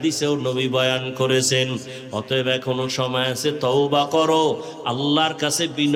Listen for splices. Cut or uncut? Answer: uncut